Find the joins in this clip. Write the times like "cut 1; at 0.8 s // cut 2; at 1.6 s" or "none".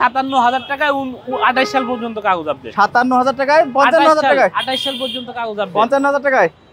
none

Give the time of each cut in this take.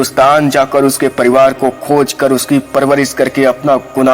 none

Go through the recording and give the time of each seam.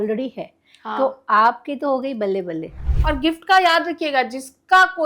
cut 1; at 2.9 s

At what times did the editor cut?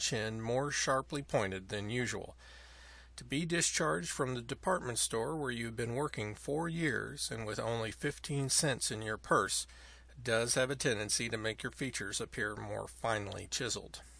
cut 1; at 12.6 s

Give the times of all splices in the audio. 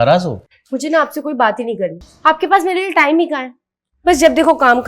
cut 1; at 2.1 s

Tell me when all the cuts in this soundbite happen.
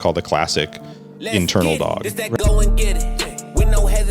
cut 1; at 2.1 s

